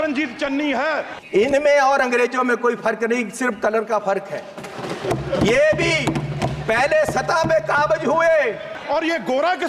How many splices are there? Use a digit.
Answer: 2